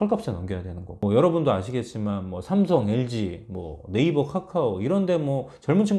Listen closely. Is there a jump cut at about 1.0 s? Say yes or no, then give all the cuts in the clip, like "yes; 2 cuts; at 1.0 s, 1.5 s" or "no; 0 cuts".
yes; 1 cut; at 1.0 s